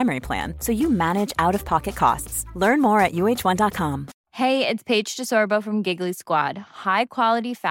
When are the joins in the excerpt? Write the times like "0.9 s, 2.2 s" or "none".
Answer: 4.1 s